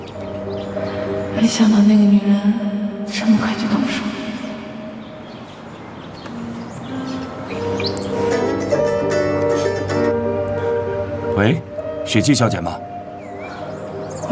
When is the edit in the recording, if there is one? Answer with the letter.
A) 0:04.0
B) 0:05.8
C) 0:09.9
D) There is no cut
D